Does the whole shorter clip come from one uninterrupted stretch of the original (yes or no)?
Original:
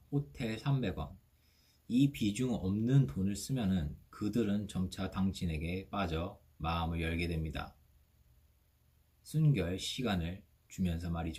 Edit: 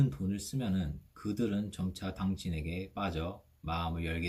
yes